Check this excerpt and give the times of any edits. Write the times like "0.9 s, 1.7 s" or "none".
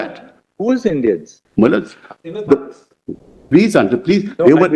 1.4 s

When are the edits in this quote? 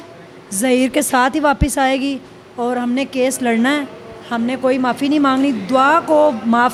none

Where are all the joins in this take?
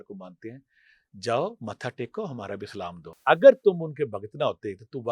3.1 s

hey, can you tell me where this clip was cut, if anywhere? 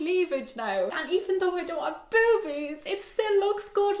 1.0 s

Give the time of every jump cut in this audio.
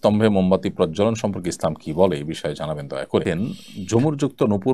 3.2 s

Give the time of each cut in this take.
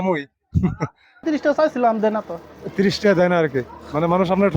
1.2 s

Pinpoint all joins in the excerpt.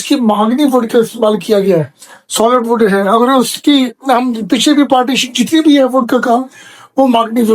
none

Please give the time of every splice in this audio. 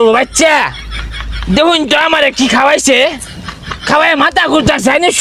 none

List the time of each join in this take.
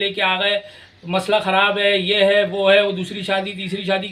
none

